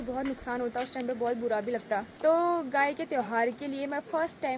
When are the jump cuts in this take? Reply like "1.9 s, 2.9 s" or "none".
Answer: 2.1 s

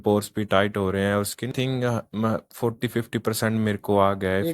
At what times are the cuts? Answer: 1.5 s

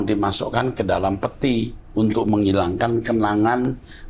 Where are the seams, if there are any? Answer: none

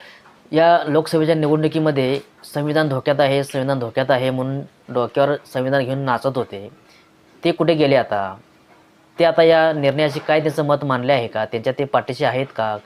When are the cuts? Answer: none

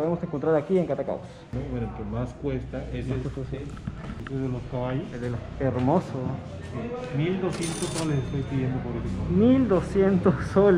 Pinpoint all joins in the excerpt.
1.4 s, 4.2 s

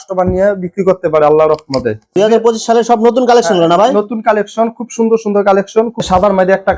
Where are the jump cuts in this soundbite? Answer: 2.0 s, 6.0 s

